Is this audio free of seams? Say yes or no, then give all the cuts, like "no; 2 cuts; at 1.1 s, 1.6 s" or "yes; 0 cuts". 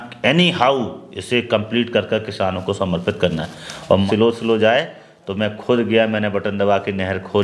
no; 1 cut; at 4.1 s